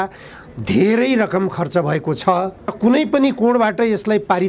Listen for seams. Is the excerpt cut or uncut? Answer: cut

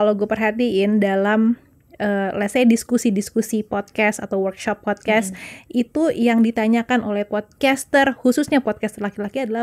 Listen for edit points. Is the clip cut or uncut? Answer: uncut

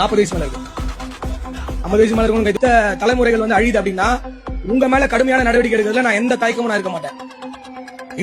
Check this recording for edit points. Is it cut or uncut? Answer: cut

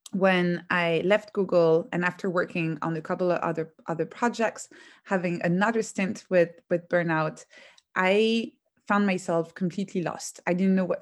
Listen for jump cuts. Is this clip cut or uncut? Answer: cut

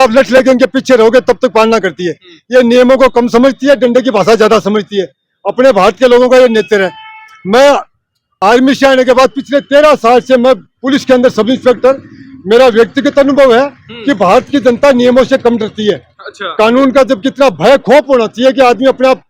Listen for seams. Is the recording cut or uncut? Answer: uncut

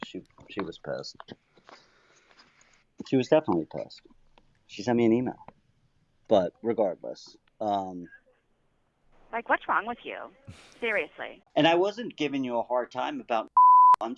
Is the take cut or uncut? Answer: cut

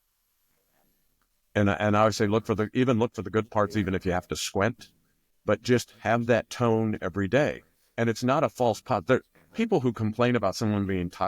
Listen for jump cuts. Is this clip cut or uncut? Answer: uncut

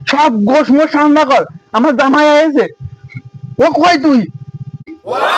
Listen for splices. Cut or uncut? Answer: uncut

